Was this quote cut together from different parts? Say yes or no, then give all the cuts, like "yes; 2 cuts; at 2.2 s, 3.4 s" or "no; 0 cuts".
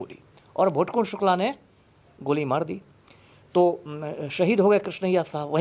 no; 0 cuts